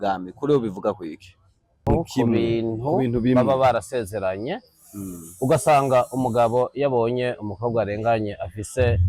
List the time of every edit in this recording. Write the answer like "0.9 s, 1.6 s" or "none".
1.8 s